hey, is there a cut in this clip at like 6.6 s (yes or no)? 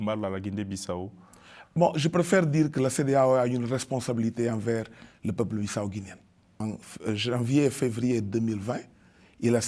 yes